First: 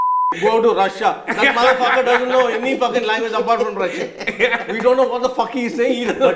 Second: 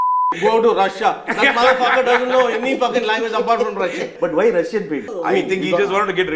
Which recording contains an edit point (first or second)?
second